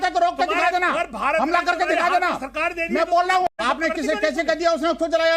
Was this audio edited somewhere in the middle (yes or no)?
yes